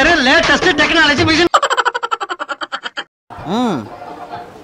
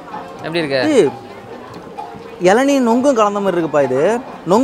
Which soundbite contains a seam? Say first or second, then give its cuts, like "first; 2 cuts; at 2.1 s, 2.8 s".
first; 2 cuts; at 1.5 s, 3.1 s